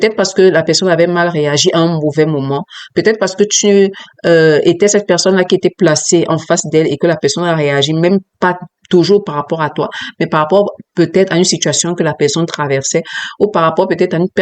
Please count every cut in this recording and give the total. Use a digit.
0